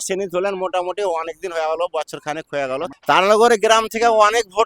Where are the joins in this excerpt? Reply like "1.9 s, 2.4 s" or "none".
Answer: 2.9 s